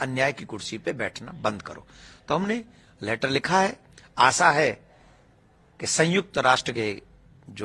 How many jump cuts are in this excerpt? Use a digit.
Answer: 0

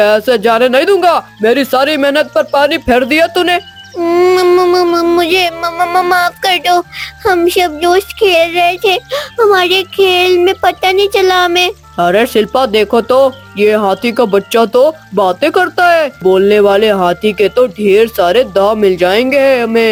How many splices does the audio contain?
0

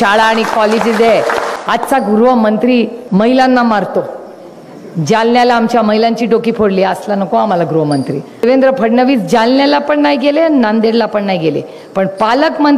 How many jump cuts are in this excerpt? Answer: 3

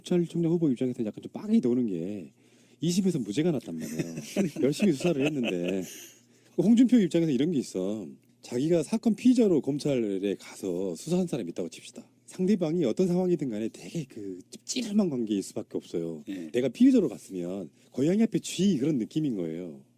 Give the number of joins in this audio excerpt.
1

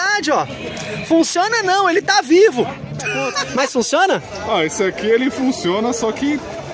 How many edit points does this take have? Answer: 1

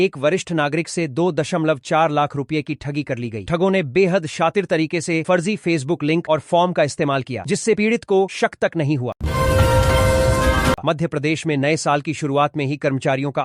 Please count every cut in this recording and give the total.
2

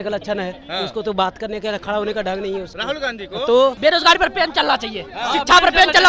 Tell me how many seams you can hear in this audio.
1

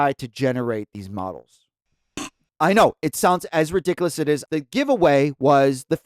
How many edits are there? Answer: 2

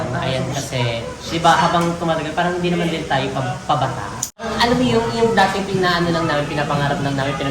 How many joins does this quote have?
1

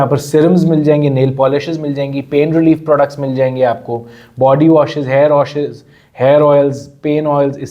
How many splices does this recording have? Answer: 0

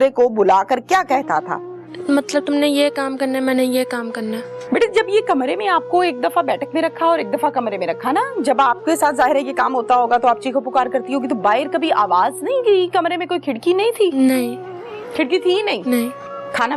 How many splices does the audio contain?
2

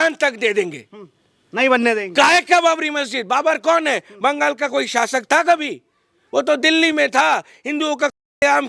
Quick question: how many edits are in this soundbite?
0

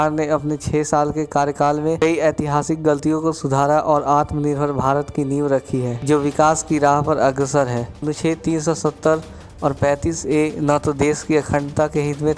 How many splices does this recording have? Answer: 3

